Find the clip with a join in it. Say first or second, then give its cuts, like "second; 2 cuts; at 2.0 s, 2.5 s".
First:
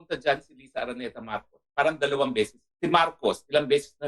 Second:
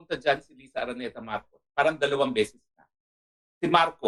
first; 1 cut; at 2.6 s